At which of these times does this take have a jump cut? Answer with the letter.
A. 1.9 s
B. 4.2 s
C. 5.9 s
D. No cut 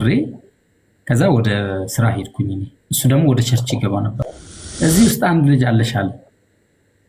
B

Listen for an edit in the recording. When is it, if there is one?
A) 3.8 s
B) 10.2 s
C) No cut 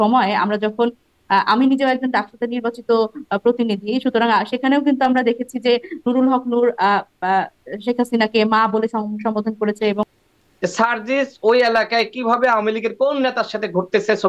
B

